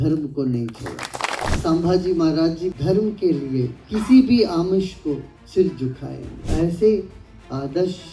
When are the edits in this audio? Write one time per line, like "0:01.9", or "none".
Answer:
0:01.5
0:02.7
0:03.8
0:05.4
0:06.5

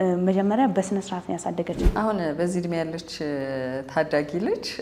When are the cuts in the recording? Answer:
0:01.8

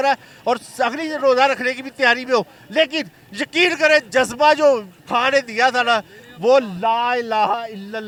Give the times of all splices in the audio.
none

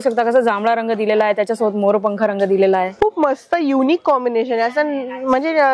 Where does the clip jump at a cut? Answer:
none

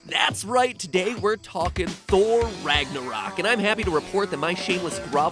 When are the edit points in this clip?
0:01.5

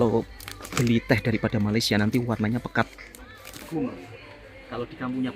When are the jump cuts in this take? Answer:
0:03.6

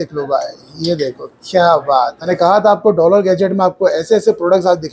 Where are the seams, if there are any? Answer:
0:02.2

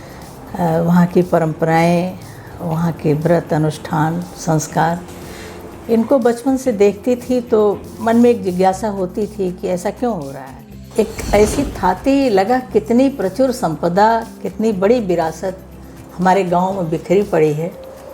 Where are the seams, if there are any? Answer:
0:10.8

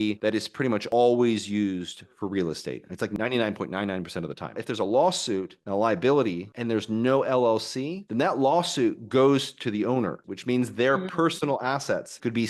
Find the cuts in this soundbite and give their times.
0:04.5
0:10.2

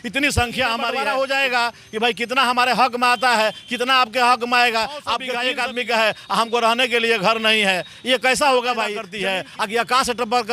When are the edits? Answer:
0:00.9
0:05.3
0:09.1

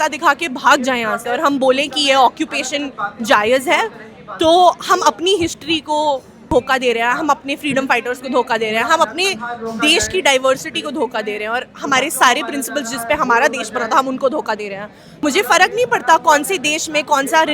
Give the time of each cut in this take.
0:06.4
0:15.1

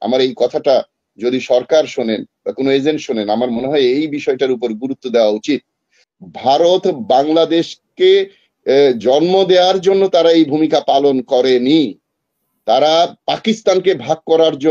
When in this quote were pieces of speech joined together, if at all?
0:06.0

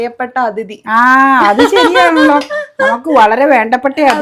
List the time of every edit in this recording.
none

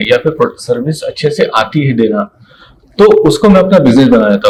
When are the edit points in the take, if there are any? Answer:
none

